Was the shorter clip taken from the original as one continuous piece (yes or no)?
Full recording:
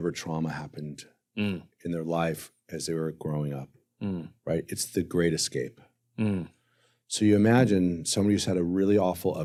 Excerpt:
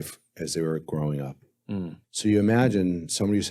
no